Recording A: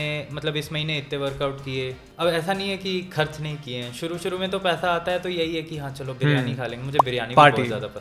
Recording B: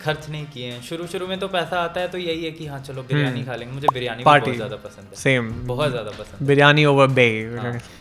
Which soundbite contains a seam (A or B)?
A